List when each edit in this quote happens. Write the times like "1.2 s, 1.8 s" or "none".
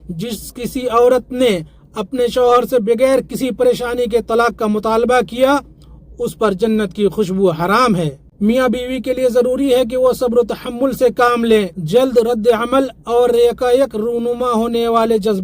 8.2 s, 11.8 s